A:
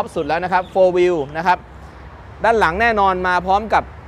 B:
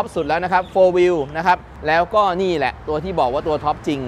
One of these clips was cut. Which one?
B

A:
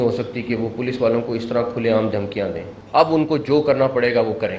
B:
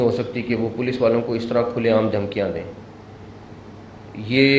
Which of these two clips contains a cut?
A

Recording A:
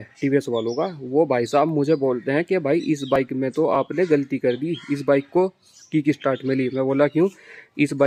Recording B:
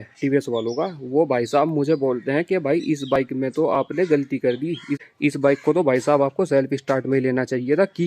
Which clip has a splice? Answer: B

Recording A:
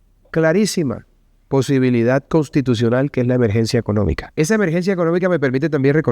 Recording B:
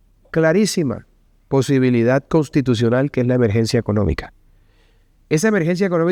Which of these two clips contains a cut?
A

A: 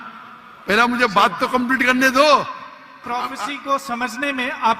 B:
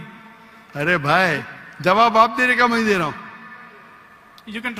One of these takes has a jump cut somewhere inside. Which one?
A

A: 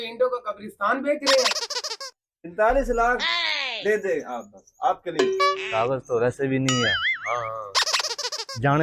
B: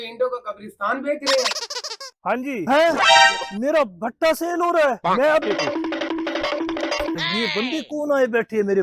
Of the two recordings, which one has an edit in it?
B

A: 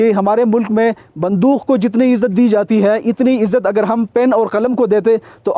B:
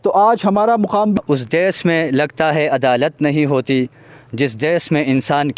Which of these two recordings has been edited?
B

